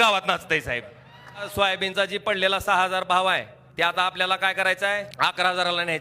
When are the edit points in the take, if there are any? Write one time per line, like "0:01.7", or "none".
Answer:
0:01.5
0:03.6
0:05.1